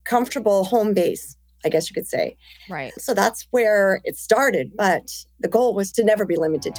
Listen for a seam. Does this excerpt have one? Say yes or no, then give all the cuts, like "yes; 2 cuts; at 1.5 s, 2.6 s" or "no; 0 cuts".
yes; 1 cut; at 5.9 s